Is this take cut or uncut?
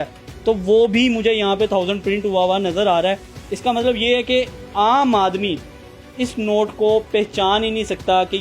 uncut